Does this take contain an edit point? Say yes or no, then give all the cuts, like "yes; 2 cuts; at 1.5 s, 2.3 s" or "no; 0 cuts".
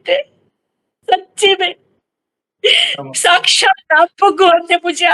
no; 0 cuts